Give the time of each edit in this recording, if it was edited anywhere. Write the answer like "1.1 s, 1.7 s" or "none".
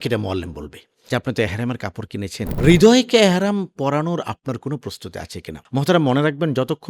1.0 s